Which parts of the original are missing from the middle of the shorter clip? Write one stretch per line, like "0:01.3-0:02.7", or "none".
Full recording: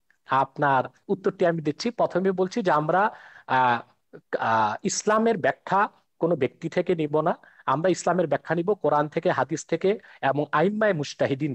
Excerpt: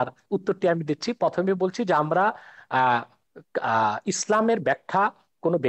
none